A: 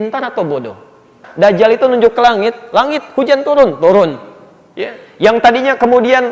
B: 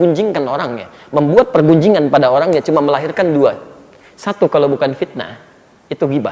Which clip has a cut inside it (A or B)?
A